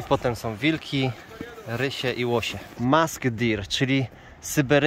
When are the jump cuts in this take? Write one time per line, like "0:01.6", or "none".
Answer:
0:02.6

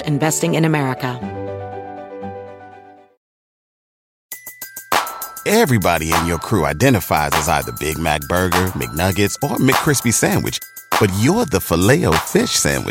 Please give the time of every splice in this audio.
0:01.1

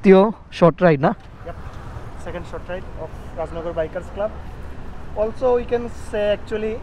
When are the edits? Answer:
none

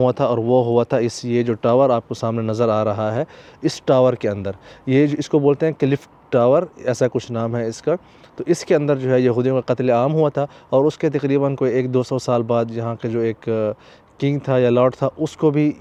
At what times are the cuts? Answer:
none

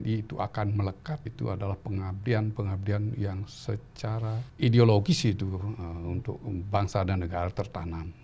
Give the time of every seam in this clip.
0:01.3
0:04.5

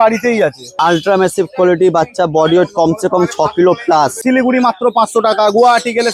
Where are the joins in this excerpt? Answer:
0:00.8
0:04.2

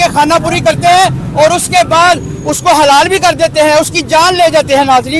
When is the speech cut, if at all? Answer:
none

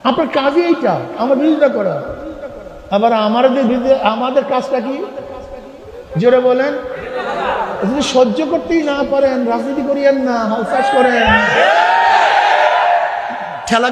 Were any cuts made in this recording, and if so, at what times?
none

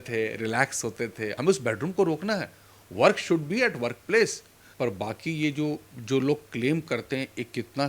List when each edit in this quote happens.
0:01.3
0:04.6

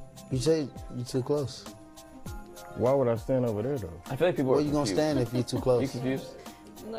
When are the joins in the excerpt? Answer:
0:04.9

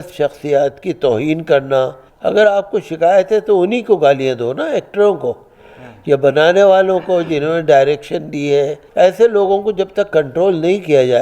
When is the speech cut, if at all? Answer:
0:02.1
0:08.8

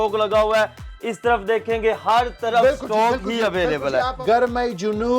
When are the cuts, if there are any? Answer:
0:04.2

